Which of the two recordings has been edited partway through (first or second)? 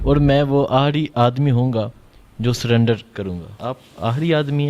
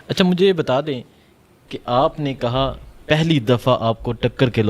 first